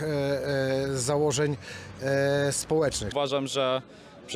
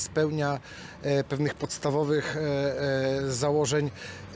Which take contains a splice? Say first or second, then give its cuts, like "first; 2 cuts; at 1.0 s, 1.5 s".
first; 1 cut; at 3.1 s